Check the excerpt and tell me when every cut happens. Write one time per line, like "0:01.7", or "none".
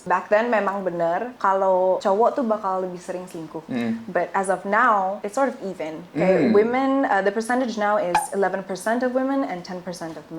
0:01.3

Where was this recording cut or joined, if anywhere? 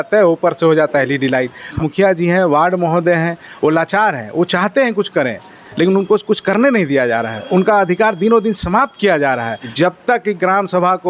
0:01.7
0:09.7

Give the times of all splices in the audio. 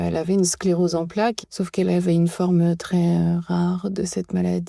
0:01.4

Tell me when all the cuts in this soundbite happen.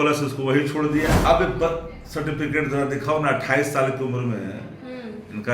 0:01.2

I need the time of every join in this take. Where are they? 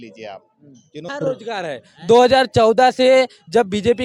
0:01.1

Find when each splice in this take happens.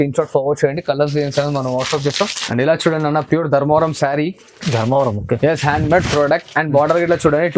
0:02.4

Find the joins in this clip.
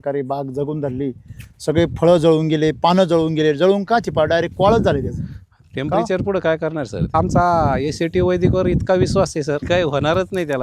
0:07.1
0:09.6

